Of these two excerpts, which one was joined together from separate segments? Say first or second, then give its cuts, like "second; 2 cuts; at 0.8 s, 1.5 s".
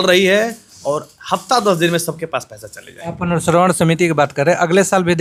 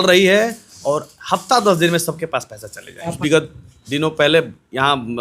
second; 1 cut; at 3.1 s